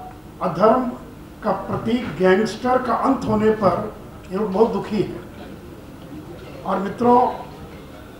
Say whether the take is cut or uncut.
cut